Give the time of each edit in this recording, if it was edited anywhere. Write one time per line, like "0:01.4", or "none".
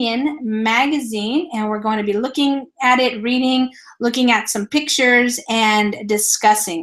0:04.1